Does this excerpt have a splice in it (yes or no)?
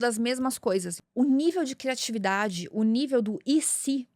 yes